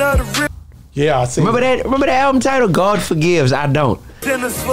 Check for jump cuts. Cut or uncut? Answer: uncut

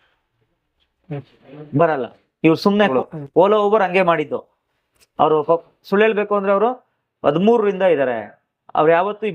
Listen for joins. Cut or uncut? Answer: cut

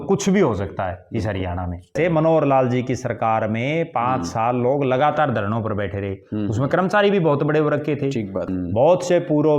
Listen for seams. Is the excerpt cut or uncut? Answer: cut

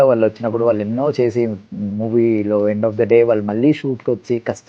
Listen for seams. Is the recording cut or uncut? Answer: uncut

